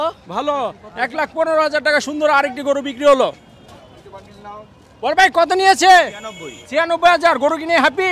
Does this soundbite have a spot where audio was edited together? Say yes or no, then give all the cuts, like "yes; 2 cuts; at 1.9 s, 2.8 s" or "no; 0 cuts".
no; 0 cuts